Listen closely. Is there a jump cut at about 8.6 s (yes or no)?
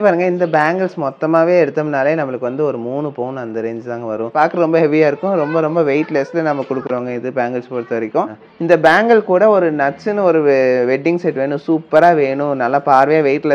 yes